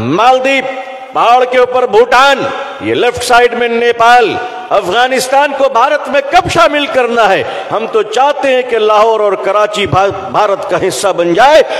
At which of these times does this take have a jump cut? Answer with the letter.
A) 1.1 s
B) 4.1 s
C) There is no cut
C